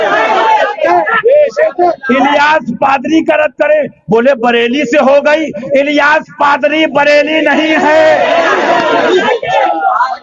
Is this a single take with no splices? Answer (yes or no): yes